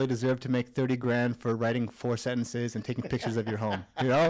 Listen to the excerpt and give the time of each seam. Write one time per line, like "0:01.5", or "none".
none

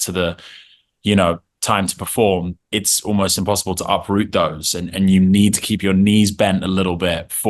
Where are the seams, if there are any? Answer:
0:02.6

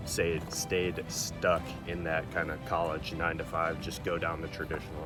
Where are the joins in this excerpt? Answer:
none

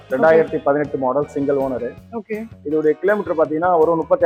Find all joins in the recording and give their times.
none

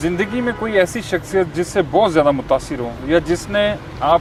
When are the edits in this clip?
none

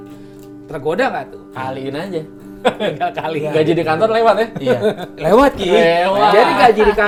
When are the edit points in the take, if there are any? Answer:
none

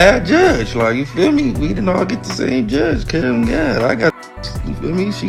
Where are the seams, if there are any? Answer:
none

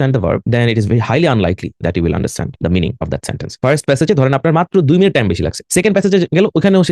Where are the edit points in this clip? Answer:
0:03.5

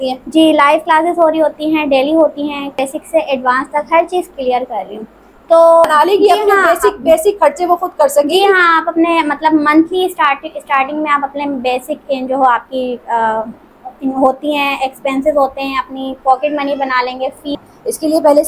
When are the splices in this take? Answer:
0:02.8
0:05.9
0:17.6

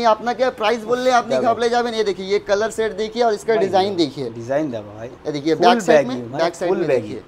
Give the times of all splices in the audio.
none

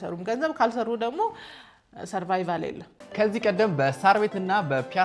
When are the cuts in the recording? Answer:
0:03.0

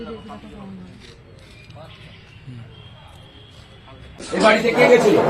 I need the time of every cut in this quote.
0:04.2

